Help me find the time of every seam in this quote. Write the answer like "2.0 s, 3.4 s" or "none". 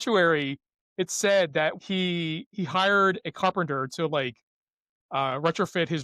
1.8 s

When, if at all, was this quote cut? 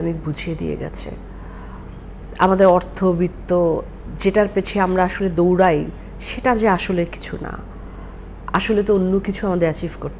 none

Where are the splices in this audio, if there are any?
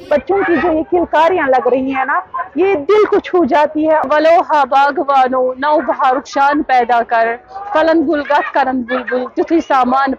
4.1 s

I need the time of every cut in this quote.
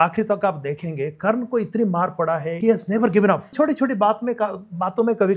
2.5 s, 3.5 s

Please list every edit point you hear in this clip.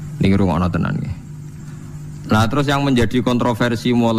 none

